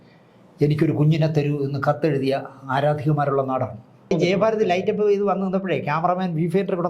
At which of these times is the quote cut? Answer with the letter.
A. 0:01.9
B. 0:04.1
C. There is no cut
B